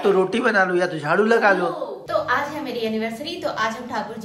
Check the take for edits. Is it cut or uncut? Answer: uncut